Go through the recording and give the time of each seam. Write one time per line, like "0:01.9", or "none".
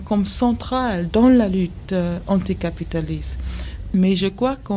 none